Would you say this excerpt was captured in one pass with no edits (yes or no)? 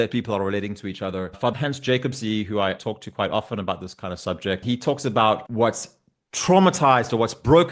no